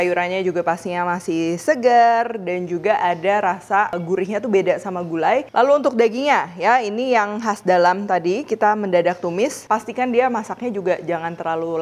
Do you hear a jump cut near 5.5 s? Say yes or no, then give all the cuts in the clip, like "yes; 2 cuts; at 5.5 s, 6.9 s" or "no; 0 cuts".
yes; 3 cuts; at 4.0 s, 5.5 s, 9.6 s